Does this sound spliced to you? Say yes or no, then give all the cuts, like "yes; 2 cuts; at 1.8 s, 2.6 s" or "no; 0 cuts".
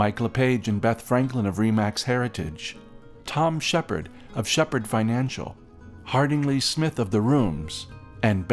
no; 0 cuts